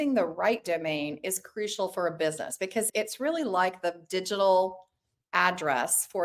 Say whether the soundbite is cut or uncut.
uncut